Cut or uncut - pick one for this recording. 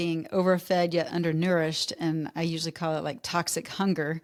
uncut